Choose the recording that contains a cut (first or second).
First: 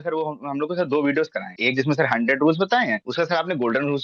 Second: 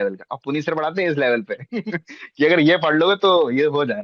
first